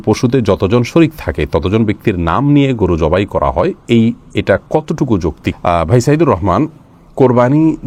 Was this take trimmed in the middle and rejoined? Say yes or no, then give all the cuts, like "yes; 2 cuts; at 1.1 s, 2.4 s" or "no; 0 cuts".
no; 0 cuts